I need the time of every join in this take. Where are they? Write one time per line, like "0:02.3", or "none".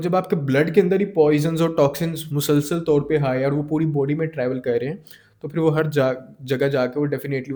none